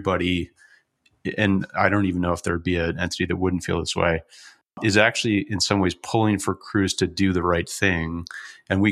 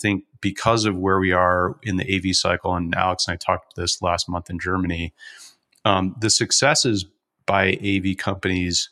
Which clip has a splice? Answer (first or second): first